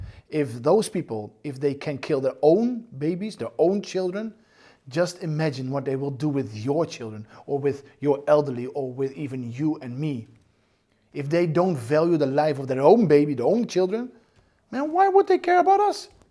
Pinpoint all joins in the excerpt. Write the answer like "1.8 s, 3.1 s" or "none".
none